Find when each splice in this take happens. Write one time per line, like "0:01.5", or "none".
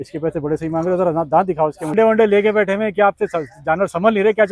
0:01.9